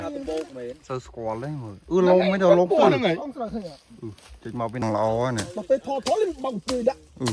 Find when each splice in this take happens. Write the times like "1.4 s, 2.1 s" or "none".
4.8 s